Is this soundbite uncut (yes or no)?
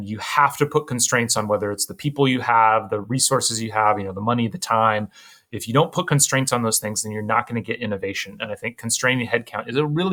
yes